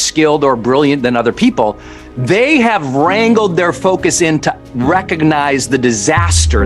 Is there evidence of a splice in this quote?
no; 0 cuts

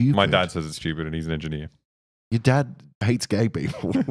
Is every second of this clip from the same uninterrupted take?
no; 1 cut; at 3.0 s

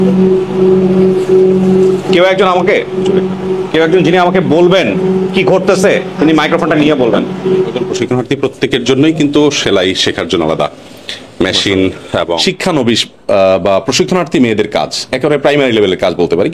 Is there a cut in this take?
yes; 3 cuts; at 2.0 s, 7.8 s, 12.4 s

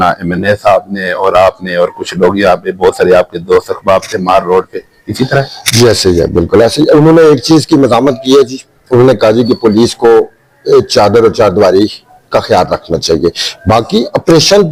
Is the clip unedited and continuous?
yes; 0 cuts

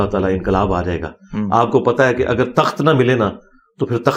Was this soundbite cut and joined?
no; 0 cuts

